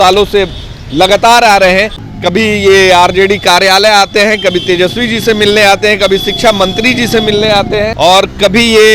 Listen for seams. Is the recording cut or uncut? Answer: cut